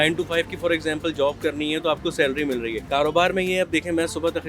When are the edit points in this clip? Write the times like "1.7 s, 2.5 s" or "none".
2.8 s